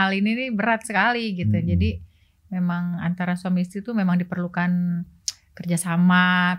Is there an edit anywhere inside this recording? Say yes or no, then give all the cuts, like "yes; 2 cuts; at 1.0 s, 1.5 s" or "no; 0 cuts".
no; 0 cuts